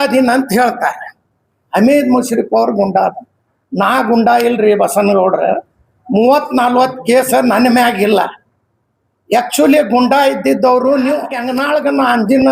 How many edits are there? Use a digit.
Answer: 1